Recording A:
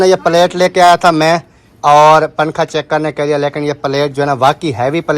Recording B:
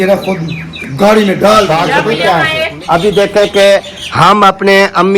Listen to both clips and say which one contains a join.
B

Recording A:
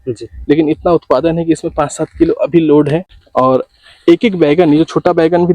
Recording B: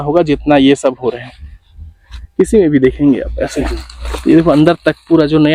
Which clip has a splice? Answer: A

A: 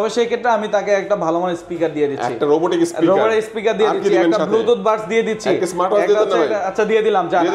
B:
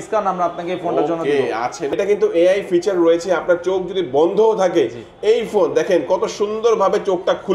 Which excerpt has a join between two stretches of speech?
B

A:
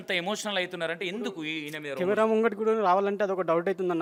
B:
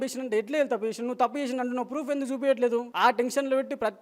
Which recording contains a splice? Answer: B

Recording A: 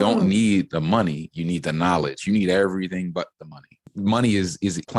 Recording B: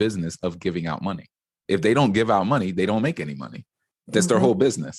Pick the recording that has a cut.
A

